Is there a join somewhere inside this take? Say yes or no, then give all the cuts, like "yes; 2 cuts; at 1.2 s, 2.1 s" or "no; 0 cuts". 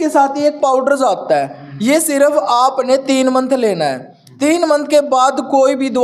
no; 0 cuts